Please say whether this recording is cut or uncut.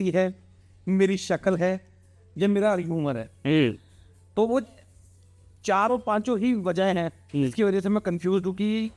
uncut